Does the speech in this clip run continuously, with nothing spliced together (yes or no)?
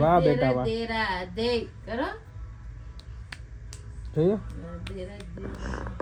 yes